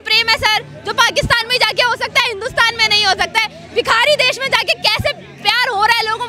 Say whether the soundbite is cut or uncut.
uncut